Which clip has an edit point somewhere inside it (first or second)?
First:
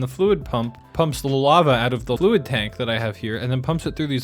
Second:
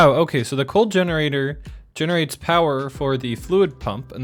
first